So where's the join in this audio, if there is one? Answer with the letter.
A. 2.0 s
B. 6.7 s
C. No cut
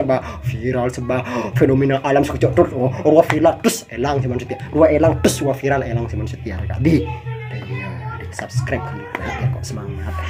C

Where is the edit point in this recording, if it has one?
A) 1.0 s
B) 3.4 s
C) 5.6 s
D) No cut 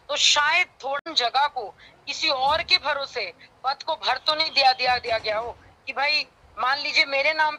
A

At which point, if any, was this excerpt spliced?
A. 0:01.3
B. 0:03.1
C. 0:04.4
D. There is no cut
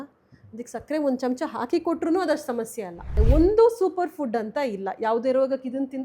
B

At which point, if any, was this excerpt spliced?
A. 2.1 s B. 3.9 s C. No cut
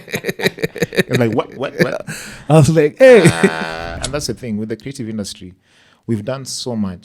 B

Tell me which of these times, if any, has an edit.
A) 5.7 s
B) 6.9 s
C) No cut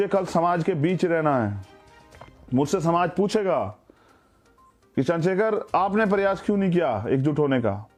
C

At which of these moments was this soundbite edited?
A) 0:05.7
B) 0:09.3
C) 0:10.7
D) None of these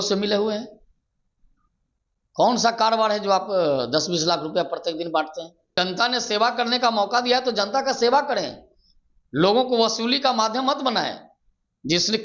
A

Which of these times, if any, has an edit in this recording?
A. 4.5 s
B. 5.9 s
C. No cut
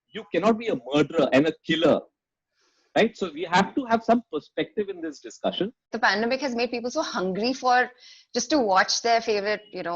B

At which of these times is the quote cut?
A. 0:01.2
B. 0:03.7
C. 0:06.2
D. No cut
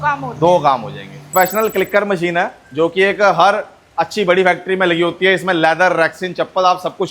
A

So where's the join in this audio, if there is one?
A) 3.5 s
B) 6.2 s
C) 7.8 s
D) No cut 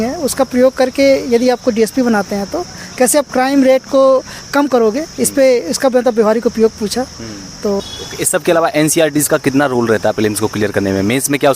C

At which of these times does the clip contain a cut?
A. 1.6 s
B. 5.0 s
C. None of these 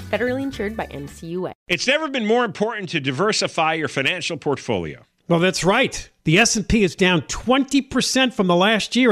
A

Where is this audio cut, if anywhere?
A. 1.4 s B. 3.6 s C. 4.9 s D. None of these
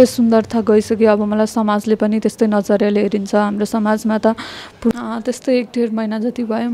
C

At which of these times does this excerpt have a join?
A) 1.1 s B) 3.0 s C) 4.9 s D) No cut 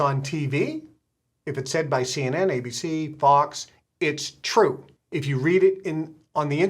C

